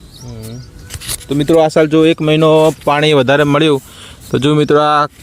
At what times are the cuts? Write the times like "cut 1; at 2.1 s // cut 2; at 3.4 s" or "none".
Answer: none